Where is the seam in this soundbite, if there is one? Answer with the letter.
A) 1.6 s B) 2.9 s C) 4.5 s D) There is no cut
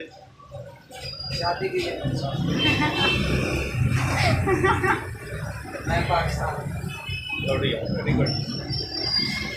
D